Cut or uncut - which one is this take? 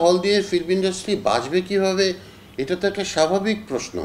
uncut